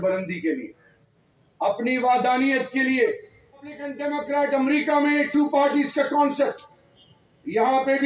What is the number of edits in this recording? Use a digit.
1